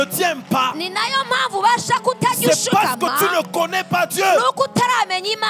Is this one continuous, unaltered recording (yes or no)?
yes